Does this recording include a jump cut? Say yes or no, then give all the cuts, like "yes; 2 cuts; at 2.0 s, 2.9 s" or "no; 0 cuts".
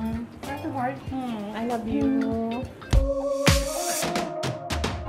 yes; 1 cut; at 3.1 s